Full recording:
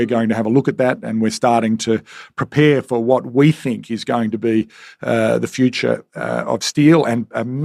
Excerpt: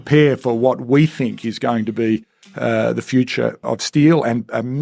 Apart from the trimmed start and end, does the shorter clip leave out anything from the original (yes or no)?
yes